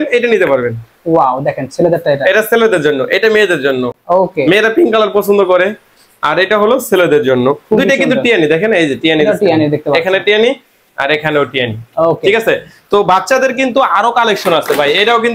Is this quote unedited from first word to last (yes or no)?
yes